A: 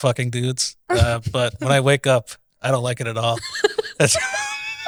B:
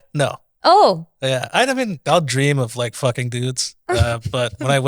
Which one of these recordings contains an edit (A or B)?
B